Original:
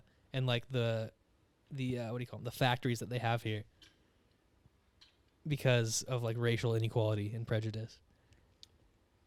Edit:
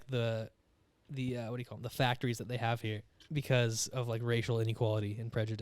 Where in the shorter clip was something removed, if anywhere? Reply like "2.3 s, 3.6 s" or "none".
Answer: 3.1 s